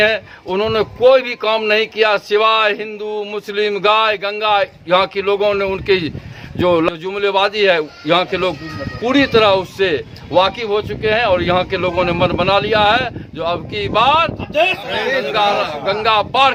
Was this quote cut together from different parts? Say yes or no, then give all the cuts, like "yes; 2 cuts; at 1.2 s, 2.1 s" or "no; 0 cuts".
no; 0 cuts